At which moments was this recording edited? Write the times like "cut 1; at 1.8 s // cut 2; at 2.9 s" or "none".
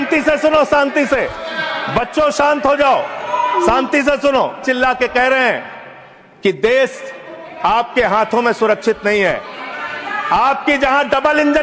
cut 1; at 4.6 s